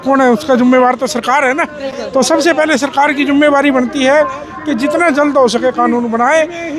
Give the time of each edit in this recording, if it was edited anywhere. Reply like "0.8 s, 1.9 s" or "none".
none